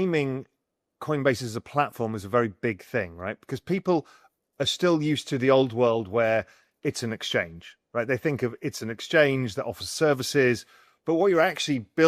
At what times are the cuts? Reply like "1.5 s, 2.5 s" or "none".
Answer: none